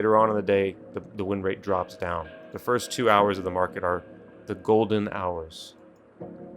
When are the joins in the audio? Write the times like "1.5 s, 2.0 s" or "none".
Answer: 5.6 s